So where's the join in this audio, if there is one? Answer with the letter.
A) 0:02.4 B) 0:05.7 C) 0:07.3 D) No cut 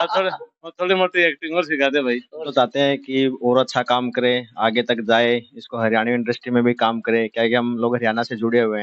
A